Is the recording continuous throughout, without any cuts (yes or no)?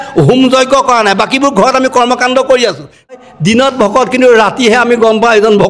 no